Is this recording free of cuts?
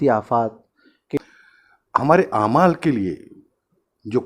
no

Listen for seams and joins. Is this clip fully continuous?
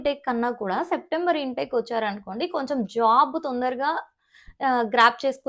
yes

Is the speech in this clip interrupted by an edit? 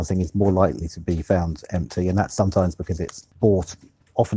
yes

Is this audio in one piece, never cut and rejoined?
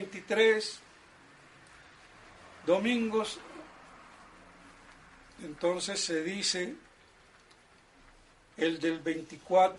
yes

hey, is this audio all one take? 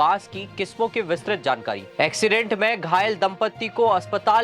no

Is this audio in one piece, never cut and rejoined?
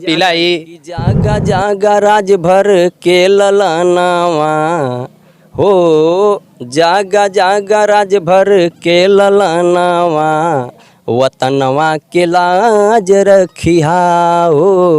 no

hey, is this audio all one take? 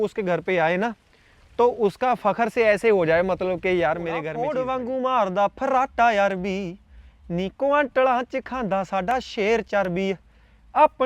no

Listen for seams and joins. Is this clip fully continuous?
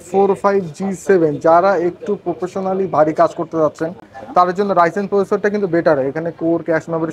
yes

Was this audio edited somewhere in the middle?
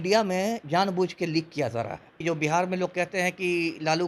yes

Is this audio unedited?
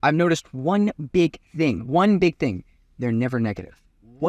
yes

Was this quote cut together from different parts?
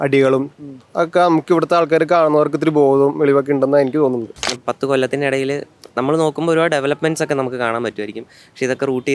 yes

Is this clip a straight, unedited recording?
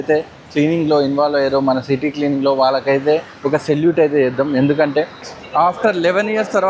no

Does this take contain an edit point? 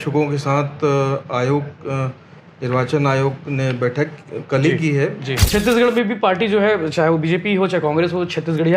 yes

